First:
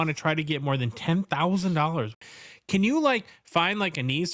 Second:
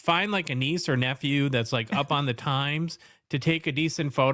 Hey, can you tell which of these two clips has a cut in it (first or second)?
first